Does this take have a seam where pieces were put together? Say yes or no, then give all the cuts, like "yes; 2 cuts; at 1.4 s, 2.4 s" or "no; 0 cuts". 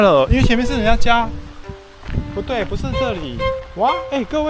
no; 0 cuts